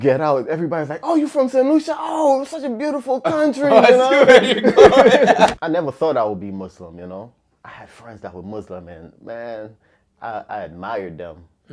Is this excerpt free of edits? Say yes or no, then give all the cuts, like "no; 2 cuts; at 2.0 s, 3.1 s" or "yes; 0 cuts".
no; 1 cut; at 5.5 s